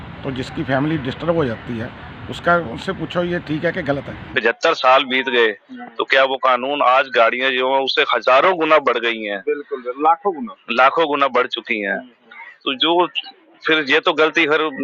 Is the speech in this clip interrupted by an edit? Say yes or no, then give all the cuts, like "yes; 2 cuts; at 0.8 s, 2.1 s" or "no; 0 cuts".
yes; 1 cut; at 4.2 s